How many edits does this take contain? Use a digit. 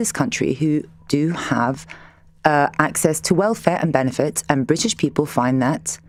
0